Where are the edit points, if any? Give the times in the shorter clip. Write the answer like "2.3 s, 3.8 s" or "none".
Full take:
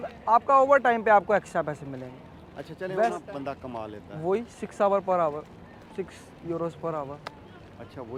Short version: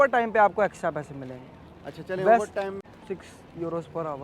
2.6 s